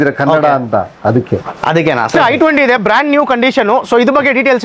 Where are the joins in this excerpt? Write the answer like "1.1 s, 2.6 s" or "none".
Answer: 2.1 s